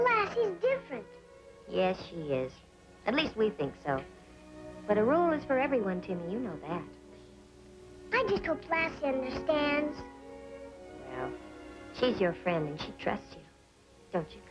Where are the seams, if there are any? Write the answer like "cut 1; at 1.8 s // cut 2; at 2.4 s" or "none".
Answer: cut 1; at 3.7 s